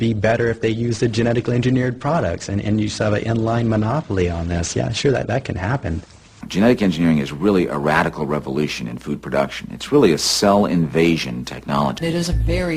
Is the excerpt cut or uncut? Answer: cut